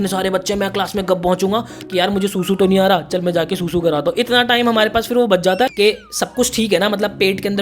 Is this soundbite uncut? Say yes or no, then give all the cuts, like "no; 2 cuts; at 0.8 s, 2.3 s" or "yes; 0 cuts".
no; 2 cuts; at 1.8 s, 5.7 s